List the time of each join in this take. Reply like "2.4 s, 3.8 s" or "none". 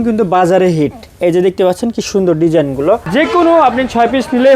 3.1 s